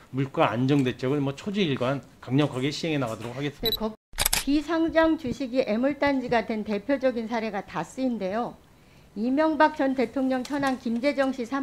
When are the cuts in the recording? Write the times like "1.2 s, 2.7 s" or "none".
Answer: 4.0 s